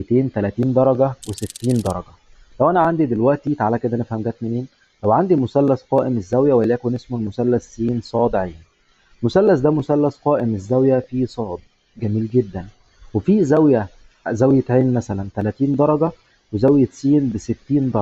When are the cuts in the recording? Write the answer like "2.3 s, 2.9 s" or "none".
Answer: none